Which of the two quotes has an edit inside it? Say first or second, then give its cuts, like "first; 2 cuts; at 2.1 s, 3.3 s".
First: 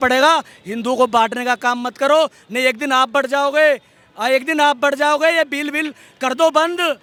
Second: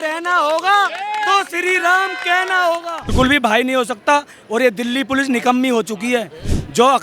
second; 1 cut; at 3.1 s